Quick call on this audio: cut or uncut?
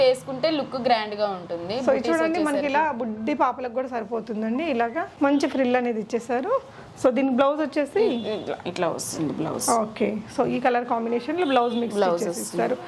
uncut